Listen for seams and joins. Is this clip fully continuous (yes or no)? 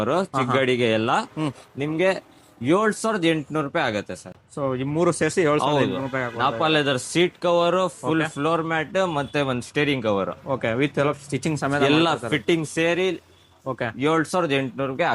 yes